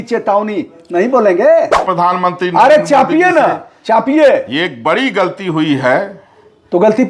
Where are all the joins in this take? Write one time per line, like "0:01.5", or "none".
0:01.8